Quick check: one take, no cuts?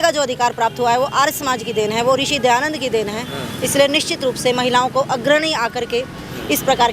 yes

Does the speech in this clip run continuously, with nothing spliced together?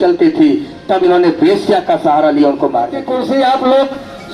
no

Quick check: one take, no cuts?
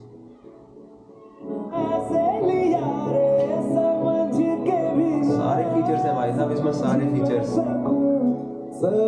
yes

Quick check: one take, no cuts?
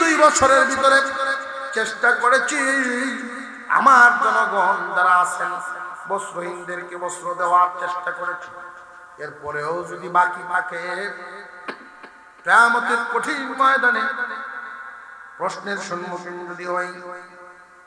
yes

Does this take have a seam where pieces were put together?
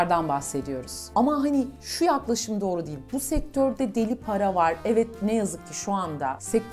yes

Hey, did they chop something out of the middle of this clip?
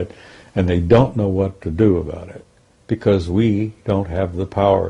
no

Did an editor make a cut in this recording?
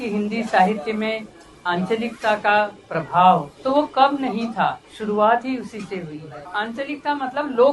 yes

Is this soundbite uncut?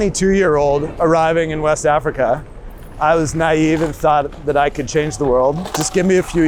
yes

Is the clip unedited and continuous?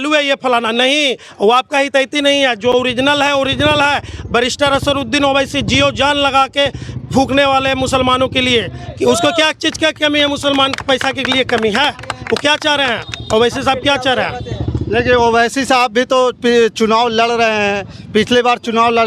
yes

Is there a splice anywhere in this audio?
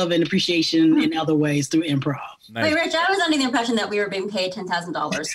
no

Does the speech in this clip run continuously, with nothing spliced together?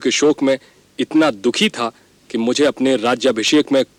yes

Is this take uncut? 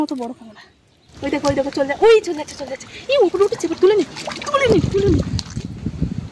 no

